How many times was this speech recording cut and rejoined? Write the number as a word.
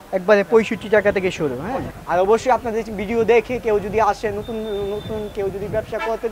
one